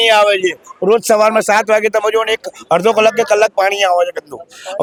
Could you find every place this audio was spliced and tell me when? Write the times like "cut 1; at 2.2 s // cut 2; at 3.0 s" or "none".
none